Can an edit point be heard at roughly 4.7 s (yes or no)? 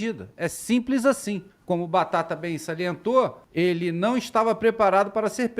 no